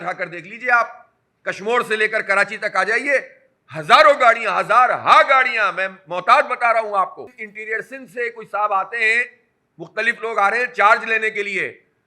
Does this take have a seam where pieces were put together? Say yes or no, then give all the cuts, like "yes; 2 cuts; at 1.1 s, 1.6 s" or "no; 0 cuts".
yes; 1 cut; at 7.5 s